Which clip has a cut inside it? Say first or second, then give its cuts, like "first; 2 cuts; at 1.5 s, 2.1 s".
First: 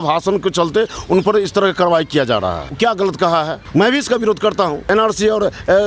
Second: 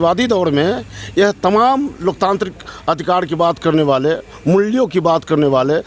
first; 3 cuts; at 2.7 s, 3.6 s, 4.8 s